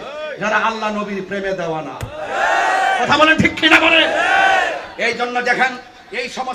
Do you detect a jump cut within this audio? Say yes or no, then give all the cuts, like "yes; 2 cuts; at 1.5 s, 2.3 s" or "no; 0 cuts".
no; 0 cuts